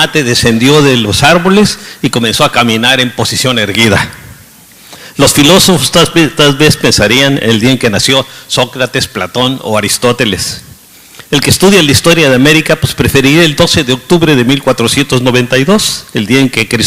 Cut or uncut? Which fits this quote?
uncut